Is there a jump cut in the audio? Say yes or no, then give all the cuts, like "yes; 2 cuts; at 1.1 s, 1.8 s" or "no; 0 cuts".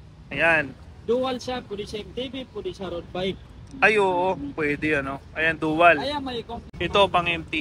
yes; 1 cut; at 6.6 s